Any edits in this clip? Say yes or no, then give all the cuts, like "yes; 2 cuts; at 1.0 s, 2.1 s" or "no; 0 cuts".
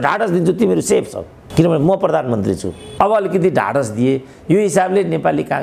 yes; 1 cut; at 2.8 s